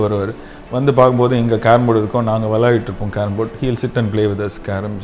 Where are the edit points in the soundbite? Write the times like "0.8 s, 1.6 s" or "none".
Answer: none